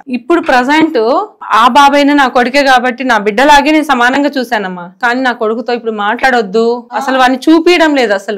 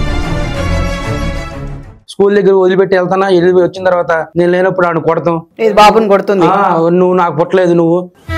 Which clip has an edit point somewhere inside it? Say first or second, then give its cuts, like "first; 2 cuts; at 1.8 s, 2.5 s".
second; 1 cut; at 2.0 s